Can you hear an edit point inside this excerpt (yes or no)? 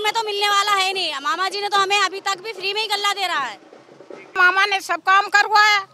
yes